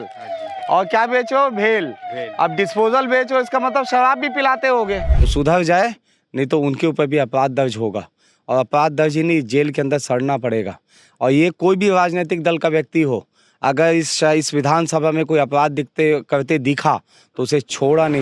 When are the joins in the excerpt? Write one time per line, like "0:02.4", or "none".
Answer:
0:05.2